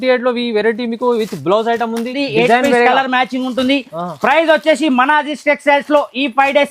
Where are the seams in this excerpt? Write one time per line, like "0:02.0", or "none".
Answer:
0:02.2

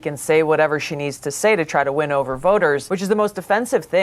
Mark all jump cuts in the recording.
0:02.9

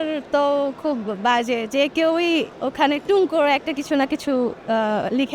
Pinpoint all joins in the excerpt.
none

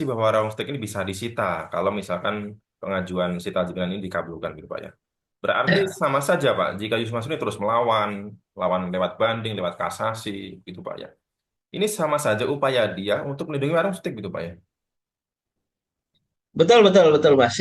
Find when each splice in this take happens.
none

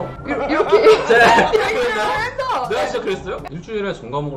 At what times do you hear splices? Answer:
0:03.4

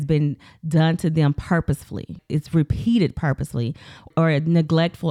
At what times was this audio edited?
0:02.2
0:04.1

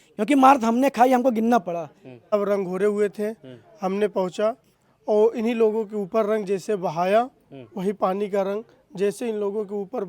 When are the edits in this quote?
0:02.3

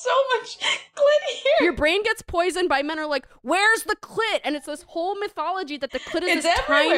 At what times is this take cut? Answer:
none

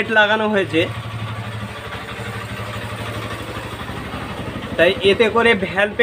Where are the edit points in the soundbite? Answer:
none

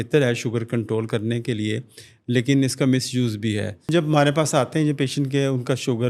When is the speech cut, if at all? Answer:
0:03.9

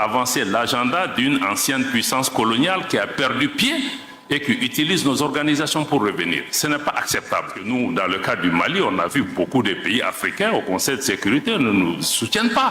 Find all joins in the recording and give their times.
0:07.6

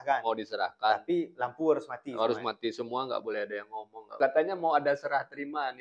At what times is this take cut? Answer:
0:04.2

